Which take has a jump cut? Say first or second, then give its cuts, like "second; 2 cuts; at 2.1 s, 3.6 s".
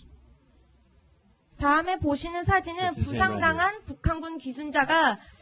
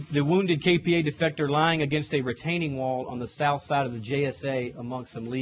second; 1 cut; at 2.6 s